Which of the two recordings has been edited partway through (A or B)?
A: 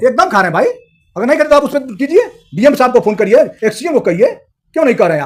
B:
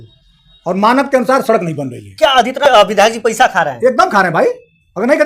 B